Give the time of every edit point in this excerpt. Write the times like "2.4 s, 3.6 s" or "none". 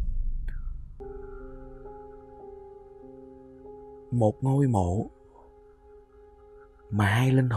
1.0 s